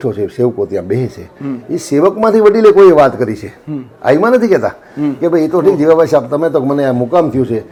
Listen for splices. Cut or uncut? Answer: uncut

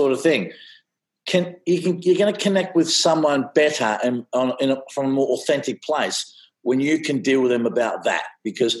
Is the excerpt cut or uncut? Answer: uncut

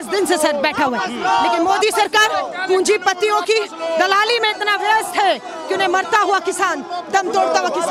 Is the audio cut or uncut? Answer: uncut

